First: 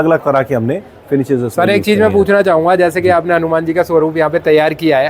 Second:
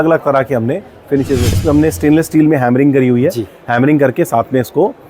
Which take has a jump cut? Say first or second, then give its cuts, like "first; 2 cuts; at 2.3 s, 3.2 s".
second; 1 cut; at 1.6 s